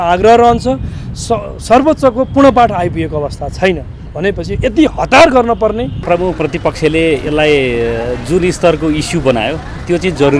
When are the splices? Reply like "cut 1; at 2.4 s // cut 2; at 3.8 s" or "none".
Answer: cut 1; at 6.0 s